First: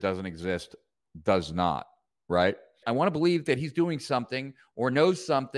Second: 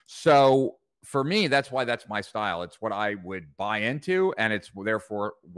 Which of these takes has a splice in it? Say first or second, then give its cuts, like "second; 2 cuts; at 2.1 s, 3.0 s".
first; 1 cut; at 2.8 s